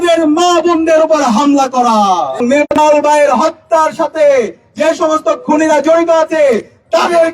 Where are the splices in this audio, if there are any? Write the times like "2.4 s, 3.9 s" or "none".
2.4 s